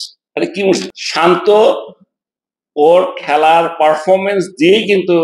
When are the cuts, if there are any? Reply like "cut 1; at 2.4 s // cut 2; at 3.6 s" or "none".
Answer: cut 1; at 1.0 s